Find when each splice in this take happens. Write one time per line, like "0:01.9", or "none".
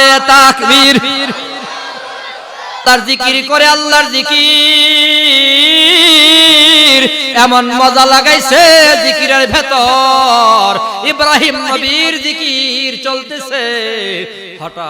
0:02.8